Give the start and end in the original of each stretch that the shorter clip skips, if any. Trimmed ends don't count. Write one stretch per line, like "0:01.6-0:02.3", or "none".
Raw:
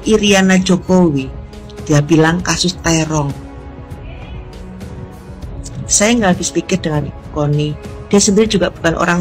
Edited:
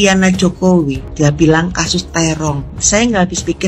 0:01.3-0:01.7
0:03.4-0:05.8

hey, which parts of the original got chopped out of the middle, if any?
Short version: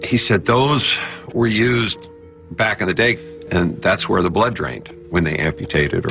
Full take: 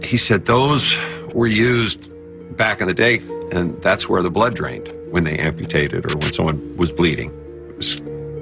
none

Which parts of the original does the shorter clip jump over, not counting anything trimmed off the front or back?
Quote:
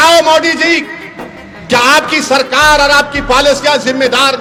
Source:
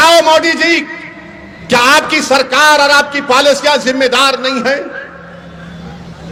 none

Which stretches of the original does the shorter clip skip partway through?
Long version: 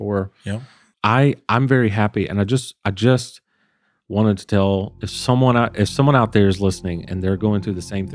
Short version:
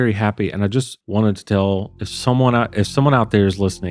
0:02.7-0:04.0

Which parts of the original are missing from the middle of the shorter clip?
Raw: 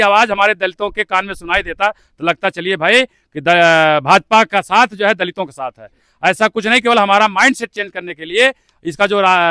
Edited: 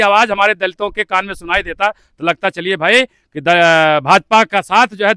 none

